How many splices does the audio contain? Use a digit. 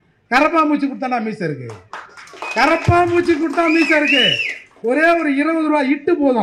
0